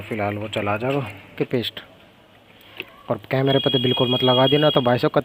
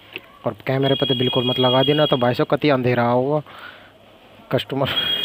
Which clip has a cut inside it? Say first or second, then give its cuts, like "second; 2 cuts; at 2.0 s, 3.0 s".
first; 1 cut; at 1.3 s